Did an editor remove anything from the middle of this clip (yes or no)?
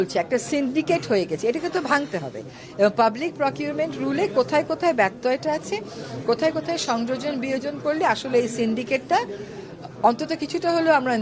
no